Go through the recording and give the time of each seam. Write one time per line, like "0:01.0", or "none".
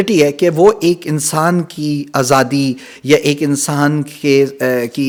none